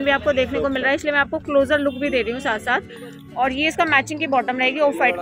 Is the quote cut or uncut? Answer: uncut